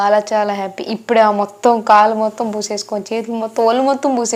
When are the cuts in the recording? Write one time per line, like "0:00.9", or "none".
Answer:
none